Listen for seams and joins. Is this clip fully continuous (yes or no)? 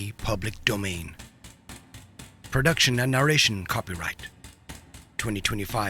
yes